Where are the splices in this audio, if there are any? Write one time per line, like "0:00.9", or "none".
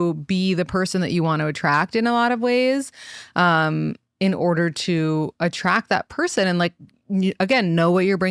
none